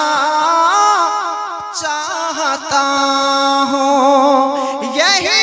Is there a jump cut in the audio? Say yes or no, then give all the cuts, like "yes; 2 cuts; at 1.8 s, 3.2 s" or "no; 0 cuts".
no; 0 cuts